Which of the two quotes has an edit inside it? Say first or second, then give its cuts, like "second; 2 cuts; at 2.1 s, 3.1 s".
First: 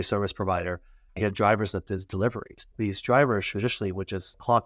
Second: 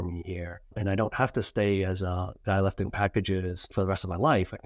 first; 2 cuts; at 1.0 s, 2.7 s